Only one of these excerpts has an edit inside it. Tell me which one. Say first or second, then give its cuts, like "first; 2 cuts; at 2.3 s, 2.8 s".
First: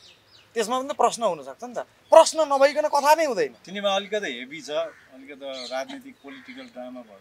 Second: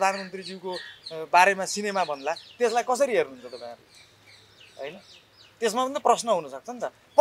first; 1 cut; at 3.6 s